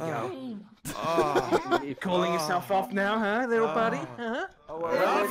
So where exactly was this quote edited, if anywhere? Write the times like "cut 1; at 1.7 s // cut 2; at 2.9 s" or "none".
none